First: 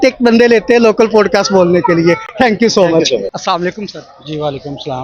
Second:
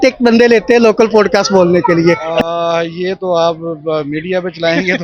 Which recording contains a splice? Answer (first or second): second